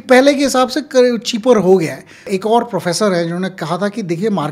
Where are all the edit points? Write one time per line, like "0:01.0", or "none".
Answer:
0:02.3